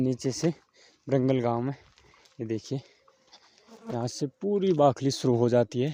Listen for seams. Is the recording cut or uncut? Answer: uncut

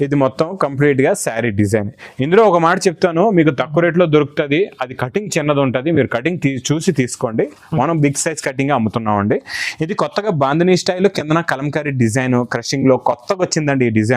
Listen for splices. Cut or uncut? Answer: uncut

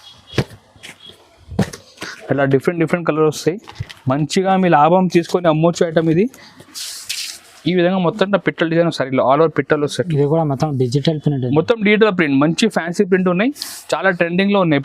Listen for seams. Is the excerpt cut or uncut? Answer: cut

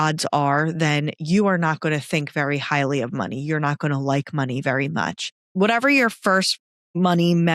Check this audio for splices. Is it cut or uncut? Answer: cut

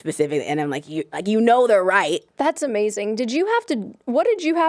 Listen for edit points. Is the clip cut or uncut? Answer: cut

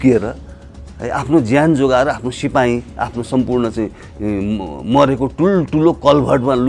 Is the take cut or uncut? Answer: uncut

